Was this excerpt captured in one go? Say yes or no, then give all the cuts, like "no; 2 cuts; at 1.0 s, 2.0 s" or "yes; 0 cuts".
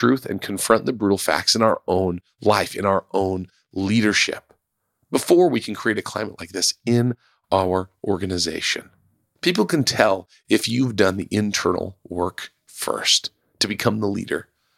yes; 0 cuts